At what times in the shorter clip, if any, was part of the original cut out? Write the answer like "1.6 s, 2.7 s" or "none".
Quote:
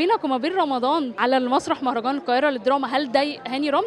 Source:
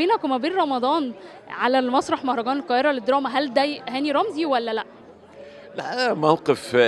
1.1 s